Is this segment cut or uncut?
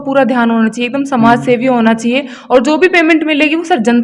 uncut